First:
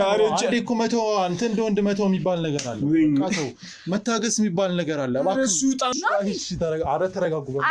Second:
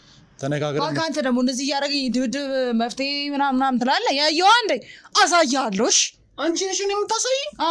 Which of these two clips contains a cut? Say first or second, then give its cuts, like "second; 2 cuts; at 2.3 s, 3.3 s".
first; 1 cut; at 5.9 s